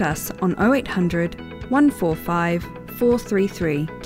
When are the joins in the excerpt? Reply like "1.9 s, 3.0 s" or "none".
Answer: none